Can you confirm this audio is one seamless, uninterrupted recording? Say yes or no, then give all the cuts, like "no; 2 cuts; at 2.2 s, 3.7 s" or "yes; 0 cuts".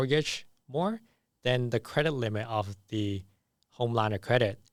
yes; 0 cuts